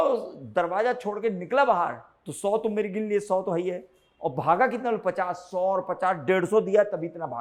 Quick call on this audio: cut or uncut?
uncut